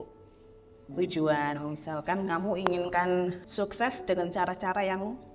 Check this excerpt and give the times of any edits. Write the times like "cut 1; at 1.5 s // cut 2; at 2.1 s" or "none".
cut 1; at 3.4 s